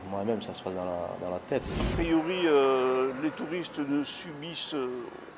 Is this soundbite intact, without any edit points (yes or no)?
no